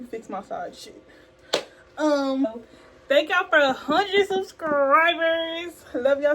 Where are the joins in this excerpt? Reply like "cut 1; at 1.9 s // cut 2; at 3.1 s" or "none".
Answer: cut 1; at 2.5 s